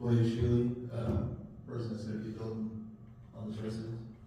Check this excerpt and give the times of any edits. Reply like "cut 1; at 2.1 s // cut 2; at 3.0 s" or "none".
none